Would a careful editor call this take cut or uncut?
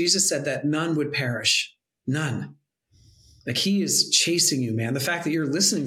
uncut